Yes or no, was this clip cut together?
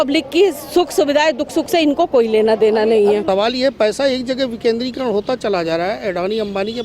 yes